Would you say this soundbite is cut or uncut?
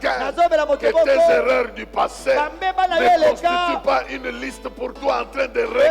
uncut